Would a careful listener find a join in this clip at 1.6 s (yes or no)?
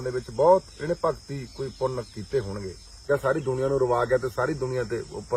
no